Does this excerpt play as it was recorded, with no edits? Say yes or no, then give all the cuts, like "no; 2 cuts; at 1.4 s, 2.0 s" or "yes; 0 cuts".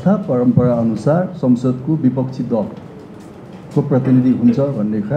yes; 0 cuts